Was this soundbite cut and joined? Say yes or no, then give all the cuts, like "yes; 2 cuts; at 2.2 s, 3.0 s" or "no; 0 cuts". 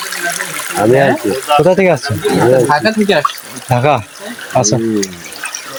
no; 0 cuts